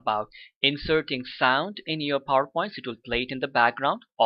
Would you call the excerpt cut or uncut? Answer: cut